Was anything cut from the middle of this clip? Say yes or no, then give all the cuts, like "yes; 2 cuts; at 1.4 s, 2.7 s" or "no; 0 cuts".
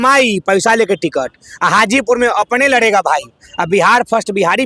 no; 0 cuts